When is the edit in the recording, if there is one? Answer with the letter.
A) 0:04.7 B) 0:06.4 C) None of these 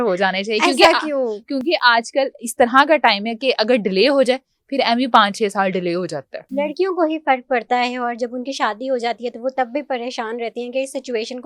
B